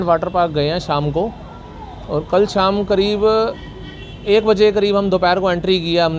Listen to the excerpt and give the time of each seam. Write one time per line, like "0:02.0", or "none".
none

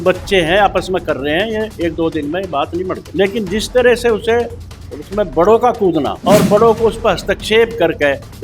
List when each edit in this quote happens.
0:03.0
0:06.2

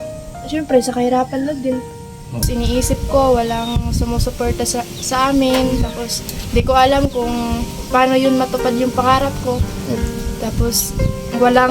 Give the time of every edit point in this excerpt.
0:02.4

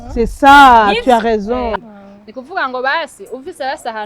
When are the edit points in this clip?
0:01.8

